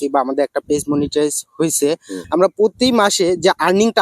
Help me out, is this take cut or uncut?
cut